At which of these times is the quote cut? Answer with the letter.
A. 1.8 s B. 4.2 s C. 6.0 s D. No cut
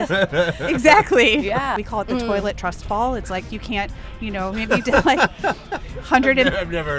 A